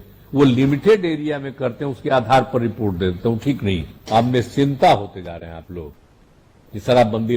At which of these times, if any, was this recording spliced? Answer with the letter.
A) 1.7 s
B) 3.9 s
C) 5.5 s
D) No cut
B